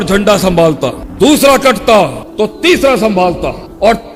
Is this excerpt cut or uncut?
uncut